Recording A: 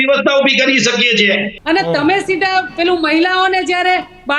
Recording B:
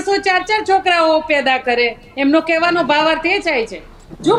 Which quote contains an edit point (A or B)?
A